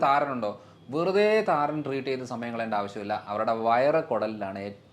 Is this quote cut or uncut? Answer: uncut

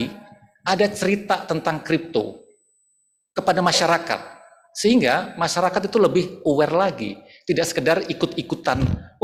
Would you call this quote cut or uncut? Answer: uncut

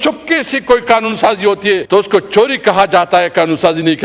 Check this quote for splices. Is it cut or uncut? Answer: cut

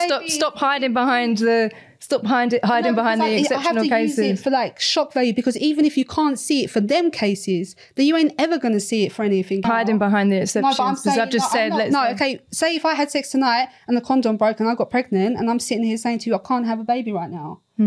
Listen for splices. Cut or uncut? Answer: cut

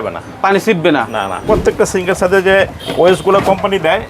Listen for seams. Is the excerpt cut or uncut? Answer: cut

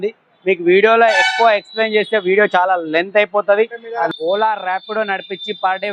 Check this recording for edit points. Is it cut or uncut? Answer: cut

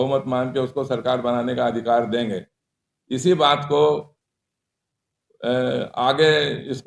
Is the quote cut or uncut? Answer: uncut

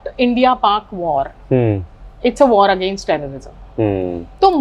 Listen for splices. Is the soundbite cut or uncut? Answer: uncut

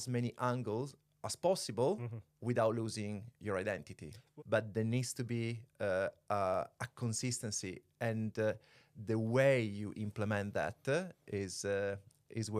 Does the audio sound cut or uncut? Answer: cut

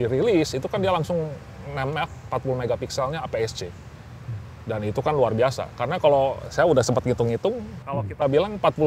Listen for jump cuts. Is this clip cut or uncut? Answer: uncut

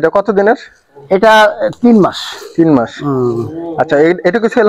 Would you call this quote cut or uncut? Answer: uncut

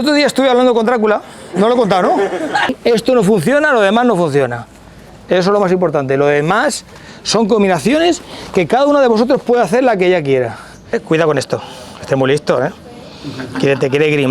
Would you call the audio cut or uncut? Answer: cut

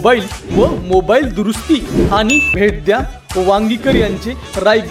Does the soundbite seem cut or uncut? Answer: cut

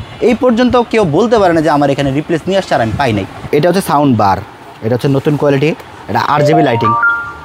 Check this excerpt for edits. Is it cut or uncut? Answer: cut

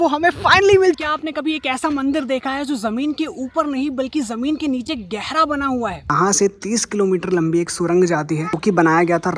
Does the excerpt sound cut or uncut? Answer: cut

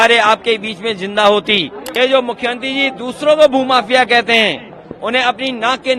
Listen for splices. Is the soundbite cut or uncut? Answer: cut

